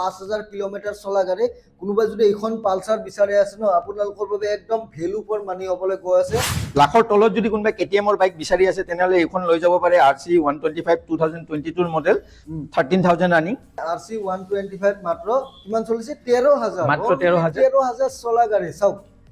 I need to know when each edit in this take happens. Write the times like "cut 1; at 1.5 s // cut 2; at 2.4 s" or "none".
cut 1; at 6.6 s // cut 2; at 13.8 s